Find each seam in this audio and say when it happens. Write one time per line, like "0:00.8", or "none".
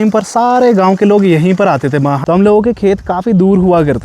0:02.2

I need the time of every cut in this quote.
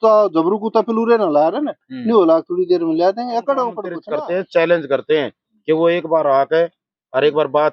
0:03.9

